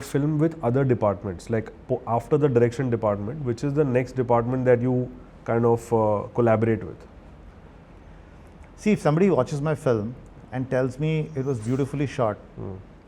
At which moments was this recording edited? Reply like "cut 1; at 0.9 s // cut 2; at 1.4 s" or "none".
none